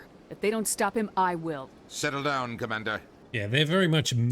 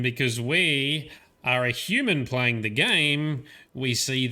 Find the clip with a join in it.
first; 1 cut; at 3.2 s

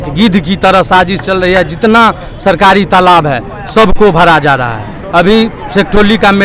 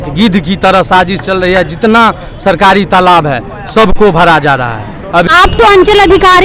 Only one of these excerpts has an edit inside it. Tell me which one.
second; 1 cut; at 5.3 s

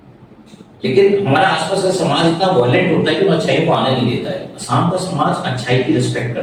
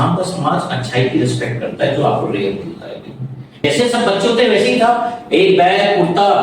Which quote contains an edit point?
second; 1 cut; at 3.6 s

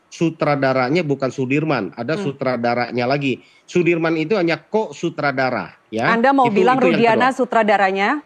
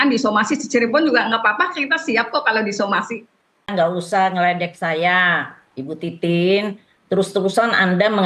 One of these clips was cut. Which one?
second; 1 cut; at 3.7 s

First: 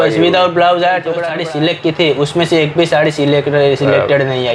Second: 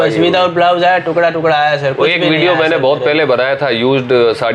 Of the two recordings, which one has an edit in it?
first; 1 cut; at 1.3 s

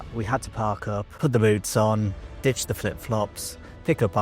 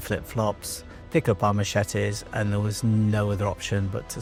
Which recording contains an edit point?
first; 1 cut; at 1.1 s

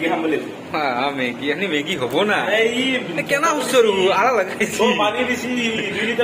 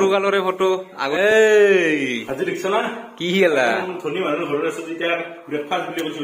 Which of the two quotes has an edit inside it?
second; 1 cut; at 1.0 s

